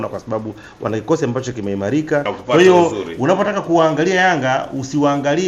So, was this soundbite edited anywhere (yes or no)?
yes